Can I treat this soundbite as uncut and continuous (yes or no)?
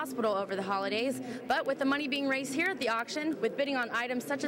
yes